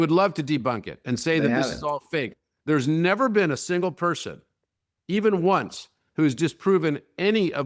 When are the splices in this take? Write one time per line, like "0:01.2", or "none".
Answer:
none